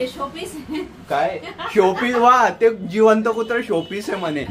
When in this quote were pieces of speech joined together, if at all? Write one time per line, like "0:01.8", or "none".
none